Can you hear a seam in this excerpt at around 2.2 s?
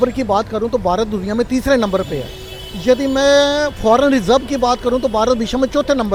no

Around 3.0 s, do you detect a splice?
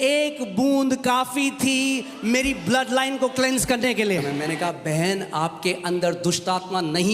no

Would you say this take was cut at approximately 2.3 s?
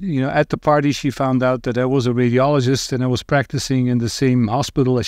no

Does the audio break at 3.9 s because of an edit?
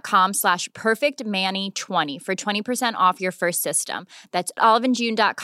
no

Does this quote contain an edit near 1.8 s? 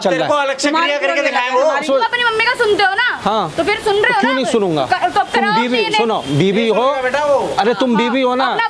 yes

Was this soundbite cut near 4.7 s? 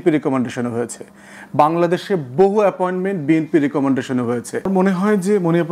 yes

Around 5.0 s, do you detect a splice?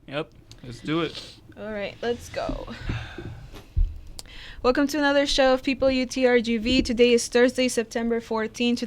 no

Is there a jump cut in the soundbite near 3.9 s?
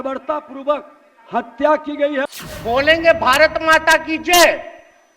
no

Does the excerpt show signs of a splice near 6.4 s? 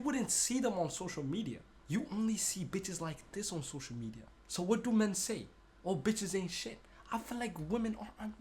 no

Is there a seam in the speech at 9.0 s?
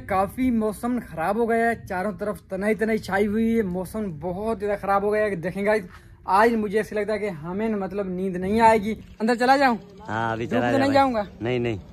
yes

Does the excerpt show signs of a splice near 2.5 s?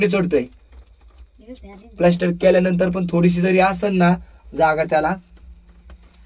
no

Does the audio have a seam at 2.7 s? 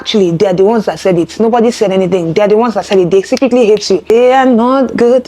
no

